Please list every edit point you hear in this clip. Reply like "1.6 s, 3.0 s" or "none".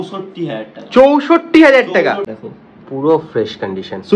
2.3 s